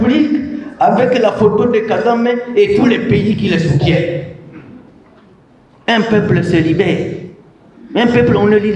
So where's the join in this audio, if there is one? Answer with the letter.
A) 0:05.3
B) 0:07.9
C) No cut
A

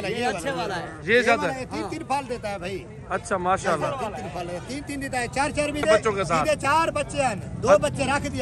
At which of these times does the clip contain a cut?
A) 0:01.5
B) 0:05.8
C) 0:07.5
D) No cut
B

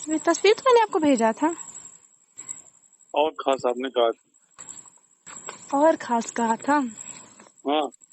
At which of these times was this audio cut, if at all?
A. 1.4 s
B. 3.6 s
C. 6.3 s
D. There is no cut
B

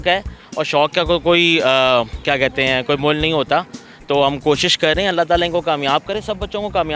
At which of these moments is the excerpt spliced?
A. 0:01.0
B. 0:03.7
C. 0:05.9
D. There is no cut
D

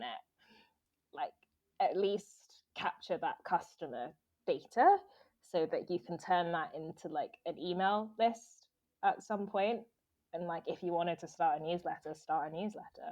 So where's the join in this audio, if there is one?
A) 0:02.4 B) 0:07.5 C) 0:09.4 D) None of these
D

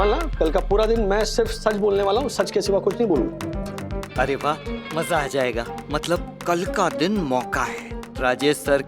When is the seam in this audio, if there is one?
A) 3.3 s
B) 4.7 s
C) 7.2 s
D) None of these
A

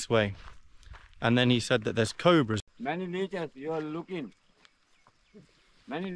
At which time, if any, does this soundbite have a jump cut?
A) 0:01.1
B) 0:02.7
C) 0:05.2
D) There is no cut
B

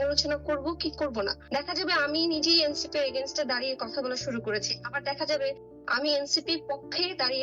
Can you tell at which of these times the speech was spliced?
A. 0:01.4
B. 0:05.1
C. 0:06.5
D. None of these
A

